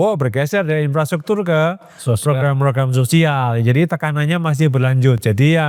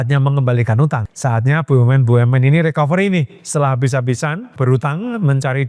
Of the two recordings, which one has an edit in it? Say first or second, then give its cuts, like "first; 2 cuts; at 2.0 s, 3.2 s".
second; 2 cuts; at 1.1 s, 4.6 s